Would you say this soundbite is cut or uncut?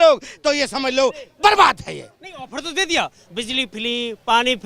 uncut